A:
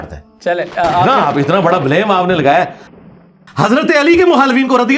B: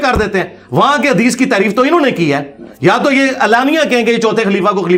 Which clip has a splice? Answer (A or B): A